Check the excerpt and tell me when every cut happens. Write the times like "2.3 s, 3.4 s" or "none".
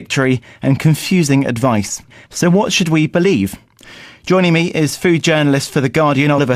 1.6 s